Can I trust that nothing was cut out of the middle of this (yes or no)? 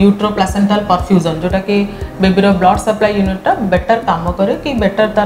yes